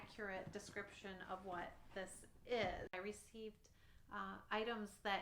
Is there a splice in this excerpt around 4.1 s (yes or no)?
no